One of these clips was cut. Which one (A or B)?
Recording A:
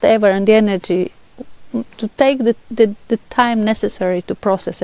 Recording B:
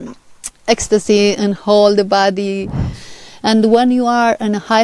B